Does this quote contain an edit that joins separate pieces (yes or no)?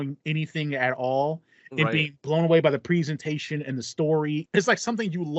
yes